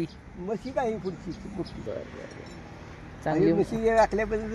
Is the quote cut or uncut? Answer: cut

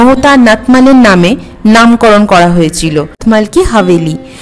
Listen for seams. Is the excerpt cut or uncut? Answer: cut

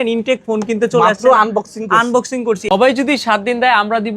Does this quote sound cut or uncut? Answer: cut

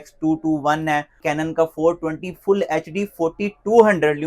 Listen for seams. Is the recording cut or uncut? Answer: cut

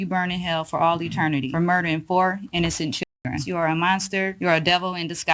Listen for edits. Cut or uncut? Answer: cut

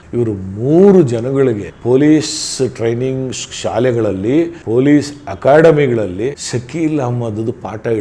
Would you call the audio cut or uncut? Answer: cut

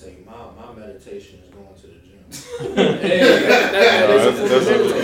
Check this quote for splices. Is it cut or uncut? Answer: uncut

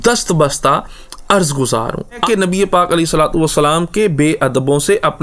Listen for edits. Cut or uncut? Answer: cut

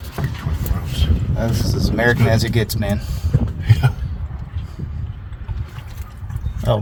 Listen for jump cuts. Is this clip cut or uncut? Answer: uncut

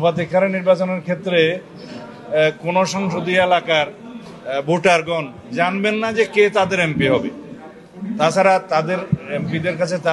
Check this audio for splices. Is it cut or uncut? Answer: uncut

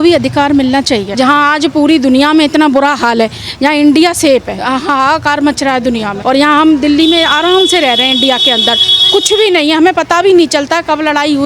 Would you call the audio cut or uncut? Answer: cut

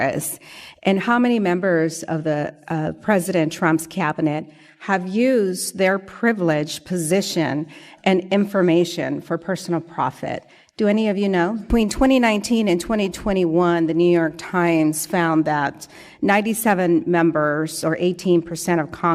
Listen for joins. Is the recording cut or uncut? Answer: cut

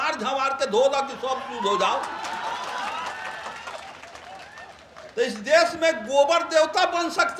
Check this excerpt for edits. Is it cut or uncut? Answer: uncut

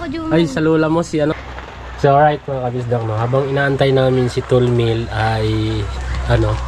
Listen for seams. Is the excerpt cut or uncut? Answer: cut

